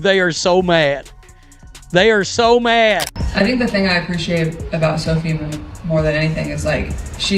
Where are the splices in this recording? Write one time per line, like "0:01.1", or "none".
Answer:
0:03.2

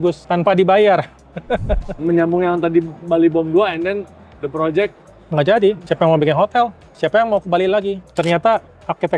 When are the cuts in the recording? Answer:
0:01.9
0:08.1

